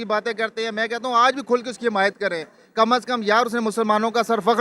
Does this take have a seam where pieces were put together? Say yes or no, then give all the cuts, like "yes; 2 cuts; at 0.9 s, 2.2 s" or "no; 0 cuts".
no; 0 cuts